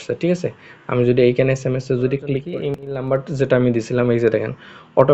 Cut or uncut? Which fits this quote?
cut